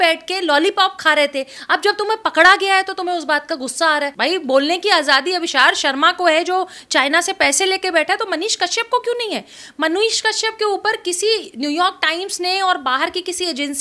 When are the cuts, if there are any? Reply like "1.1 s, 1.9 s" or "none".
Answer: 4.1 s